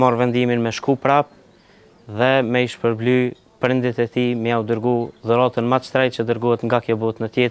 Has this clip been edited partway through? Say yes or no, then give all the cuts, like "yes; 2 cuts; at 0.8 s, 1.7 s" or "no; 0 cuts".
no; 0 cuts